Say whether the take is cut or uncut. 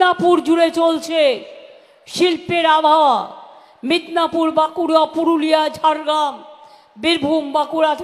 cut